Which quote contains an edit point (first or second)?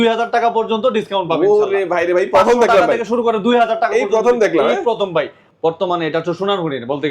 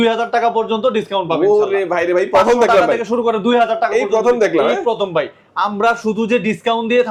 first